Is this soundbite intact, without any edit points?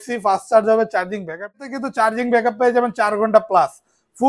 no; 1 cut; at 1.5 s

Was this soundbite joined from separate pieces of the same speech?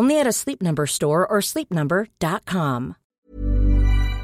yes; 1 cut; at 3.1 s

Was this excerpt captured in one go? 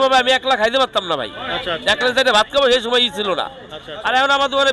yes; 0 cuts

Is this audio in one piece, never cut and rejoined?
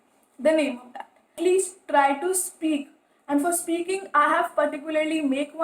no; 1 cut; at 1.4 s

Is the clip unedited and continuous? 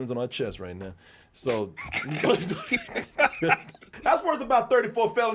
no; 1 cut; at 3.9 s

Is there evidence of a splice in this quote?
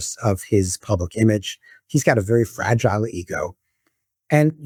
no; 0 cuts

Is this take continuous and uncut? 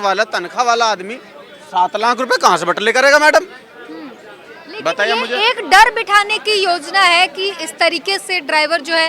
yes; 0 cuts

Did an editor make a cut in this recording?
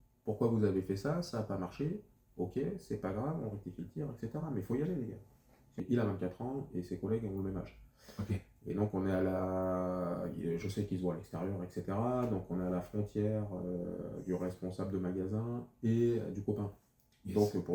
yes; 1 cut; at 5.7 s

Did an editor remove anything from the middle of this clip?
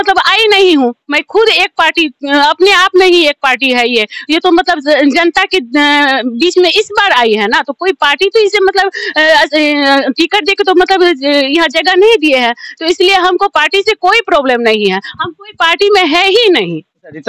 no; 0 cuts

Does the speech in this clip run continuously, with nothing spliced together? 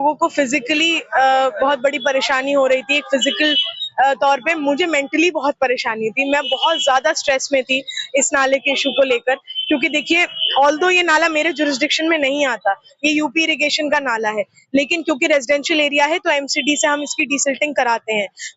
yes; 0 cuts

